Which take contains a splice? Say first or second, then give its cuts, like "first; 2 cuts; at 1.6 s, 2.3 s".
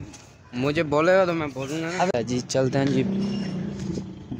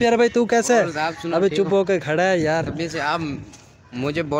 first; 1 cut; at 2.1 s